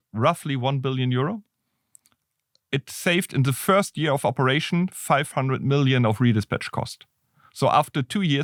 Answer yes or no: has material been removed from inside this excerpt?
no